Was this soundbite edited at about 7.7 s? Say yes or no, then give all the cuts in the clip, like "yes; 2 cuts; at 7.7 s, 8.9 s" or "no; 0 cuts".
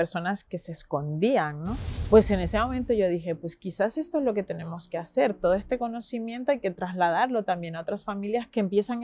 no; 1 cut; at 1.8 s